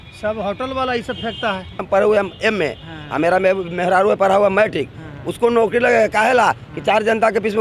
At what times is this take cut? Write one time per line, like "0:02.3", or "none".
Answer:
0:01.9

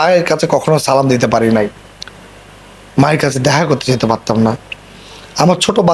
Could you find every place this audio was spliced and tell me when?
none

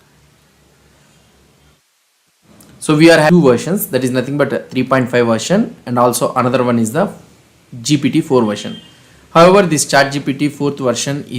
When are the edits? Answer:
0:03.3

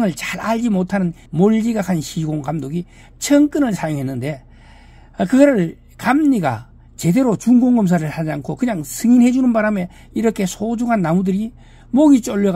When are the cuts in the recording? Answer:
0:01.2

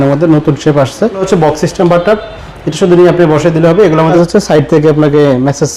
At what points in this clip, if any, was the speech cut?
0:01.2
0:04.1

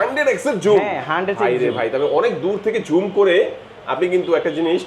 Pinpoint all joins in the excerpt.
none

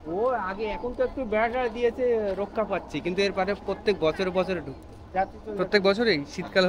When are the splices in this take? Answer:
none

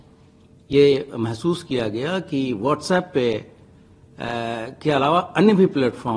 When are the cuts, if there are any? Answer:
none

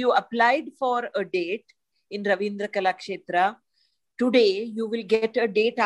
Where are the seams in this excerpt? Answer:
none

